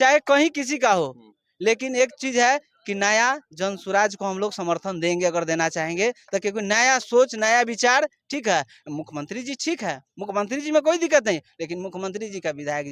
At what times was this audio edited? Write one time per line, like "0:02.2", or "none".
none